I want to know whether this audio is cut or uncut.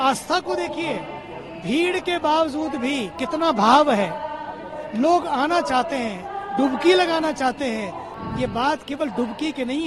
cut